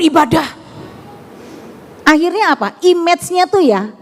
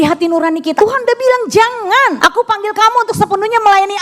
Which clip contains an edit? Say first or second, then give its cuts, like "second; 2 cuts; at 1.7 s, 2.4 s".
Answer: second; 2 cuts; at 0.8 s, 2.2 s